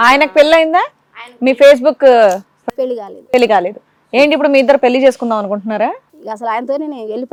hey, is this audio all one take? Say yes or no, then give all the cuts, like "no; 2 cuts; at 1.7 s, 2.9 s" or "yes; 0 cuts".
yes; 0 cuts